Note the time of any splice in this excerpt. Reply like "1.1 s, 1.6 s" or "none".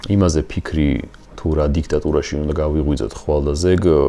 none